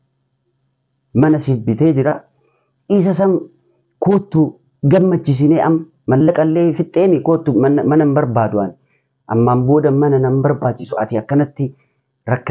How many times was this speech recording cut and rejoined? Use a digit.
0